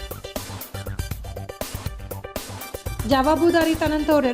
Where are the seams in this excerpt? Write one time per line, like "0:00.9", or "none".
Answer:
0:01.5
0:02.7